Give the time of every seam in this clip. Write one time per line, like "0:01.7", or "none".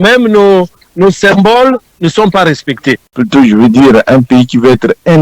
0:03.1